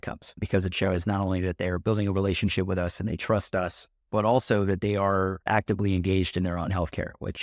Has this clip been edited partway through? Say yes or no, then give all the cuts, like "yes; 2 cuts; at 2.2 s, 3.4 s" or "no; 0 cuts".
no; 0 cuts